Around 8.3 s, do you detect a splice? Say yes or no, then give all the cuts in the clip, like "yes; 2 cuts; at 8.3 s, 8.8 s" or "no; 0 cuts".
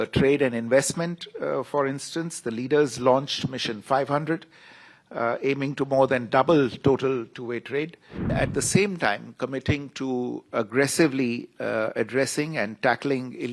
yes; 1 cut; at 8.3 s